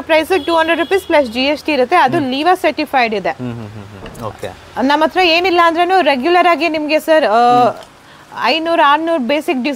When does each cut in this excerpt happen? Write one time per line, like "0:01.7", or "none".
none